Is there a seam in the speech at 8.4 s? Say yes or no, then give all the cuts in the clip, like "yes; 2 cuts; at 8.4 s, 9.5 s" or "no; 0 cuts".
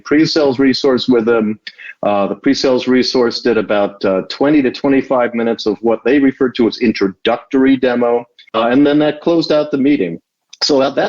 yes; 1 cut; at 8.4 s